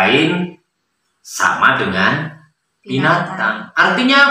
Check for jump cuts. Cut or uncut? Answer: uncut